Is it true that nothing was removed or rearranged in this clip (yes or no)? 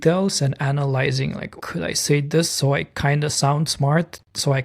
no